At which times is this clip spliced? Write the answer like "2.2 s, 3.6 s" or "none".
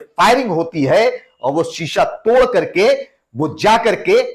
none